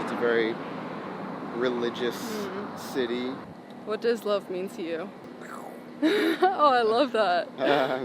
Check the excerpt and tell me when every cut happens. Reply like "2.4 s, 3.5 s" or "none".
3.6 s